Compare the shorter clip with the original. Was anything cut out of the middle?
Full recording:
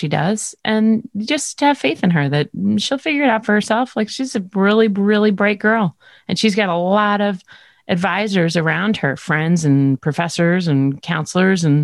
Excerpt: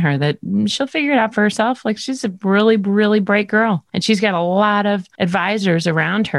yes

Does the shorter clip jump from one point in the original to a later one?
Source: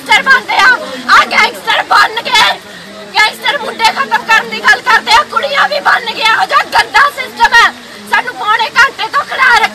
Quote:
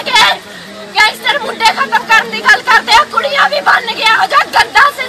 no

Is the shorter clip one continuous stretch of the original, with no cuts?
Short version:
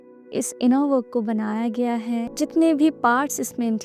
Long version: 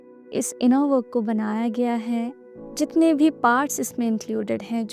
no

